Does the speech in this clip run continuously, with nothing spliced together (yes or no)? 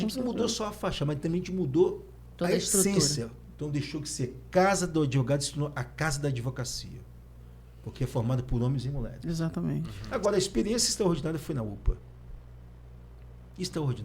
no